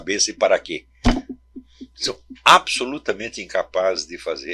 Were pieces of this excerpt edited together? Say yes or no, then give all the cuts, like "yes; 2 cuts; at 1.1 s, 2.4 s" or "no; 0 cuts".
no; 0 cuts